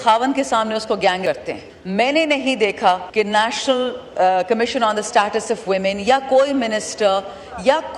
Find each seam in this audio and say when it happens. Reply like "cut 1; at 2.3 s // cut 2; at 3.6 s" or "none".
cut 1; at 1.2 s // cut 2; at 3.1 s

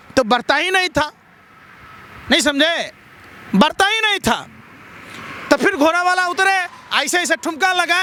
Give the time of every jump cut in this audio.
none

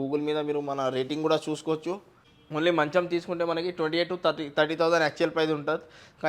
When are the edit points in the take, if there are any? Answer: cut 1; at 2.3 s

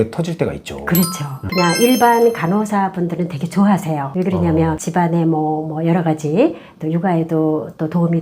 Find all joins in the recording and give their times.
cut 1; at 1.4 s

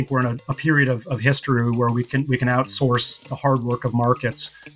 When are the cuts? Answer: none

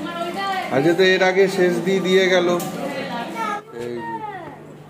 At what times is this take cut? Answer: cut 1; at 3.6 s

